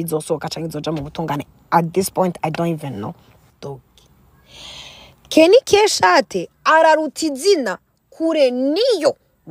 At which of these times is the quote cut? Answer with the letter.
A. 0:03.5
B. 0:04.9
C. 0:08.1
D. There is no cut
A